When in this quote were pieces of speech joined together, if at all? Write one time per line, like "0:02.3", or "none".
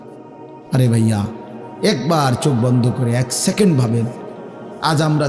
none